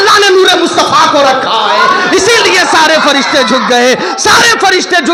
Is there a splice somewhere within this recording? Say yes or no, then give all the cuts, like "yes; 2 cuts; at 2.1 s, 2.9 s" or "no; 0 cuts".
no; 0 cuts